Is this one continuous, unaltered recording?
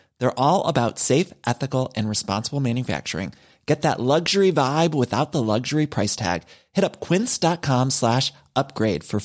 yes; 0 cuts

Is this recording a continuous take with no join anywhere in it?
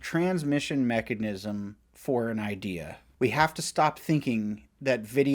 no; 1 cut; at 3.0 s

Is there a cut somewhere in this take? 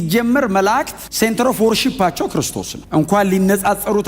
yes; 1 cut; at 1.0 s

